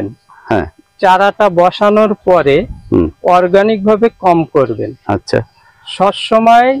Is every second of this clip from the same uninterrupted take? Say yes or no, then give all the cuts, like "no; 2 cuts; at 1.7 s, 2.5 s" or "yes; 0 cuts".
yes; 0 cuts